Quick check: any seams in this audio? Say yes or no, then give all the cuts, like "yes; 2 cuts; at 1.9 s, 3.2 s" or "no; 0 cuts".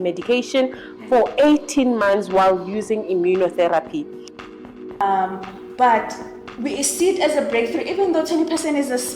yes; 1 cut; at 4.6 s